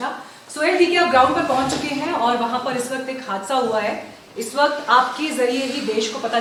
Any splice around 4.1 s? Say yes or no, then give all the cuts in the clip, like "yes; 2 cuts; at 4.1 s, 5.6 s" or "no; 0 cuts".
no; 0 cuts